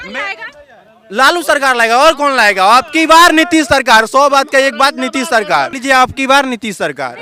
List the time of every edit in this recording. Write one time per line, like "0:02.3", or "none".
none

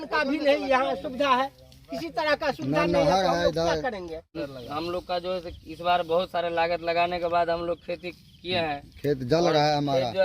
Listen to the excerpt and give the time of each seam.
0:04.4

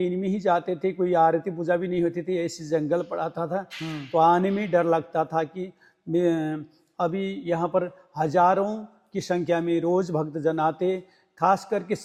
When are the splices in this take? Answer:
none

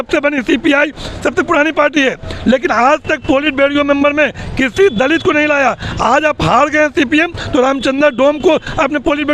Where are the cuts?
none

